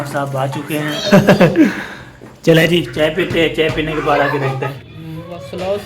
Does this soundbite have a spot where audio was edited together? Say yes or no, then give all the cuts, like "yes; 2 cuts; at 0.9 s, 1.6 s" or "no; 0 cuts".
yes; 2 cuts; at 1.0 s, 4.8 s